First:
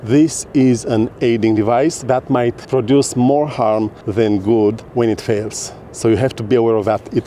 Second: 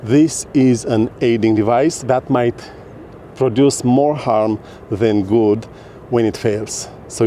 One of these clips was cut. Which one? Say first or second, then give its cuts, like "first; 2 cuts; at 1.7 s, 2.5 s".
first; 3 cuts; at 2.6 s, 4.0 s, 4.8 s